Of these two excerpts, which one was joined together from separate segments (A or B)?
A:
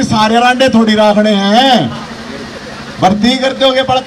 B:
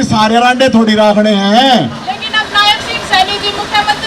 B